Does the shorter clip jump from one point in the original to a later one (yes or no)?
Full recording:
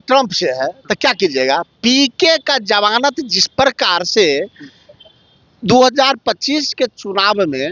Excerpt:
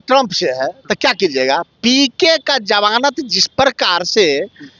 no